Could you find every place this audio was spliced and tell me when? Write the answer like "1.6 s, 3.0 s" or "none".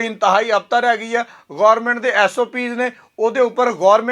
none